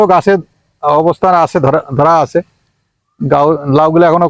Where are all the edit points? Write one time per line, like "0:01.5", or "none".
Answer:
none